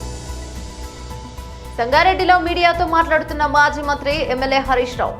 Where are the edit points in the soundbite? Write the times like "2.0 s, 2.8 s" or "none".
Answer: 1.3 s